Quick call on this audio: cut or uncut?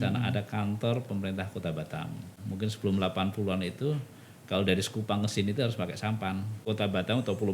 cut